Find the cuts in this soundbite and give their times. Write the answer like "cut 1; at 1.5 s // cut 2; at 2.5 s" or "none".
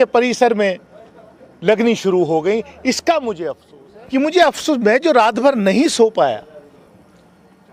cut 1; at 3.8 s